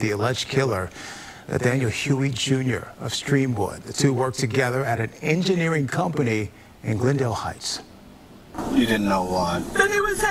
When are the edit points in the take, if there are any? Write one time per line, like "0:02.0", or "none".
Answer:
0:01.6
0:06.5
0:08.5